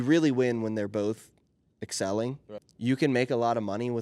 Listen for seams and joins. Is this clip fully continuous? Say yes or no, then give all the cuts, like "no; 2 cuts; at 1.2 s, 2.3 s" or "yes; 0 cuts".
no; 1 cut; at 2.6 s